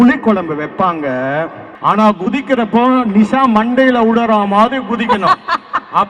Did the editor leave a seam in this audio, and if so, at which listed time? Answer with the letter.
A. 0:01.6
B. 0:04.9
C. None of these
A